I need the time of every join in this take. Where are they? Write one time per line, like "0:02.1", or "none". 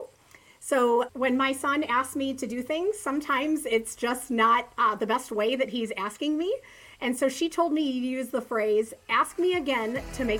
0:01.1